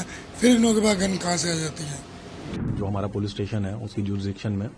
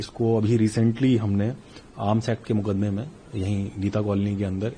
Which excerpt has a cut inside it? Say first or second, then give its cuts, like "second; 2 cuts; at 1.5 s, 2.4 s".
first; 1 cut; at 2.7 s